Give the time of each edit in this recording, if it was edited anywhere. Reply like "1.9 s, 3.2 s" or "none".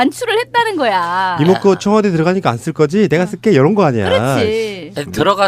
1.7 s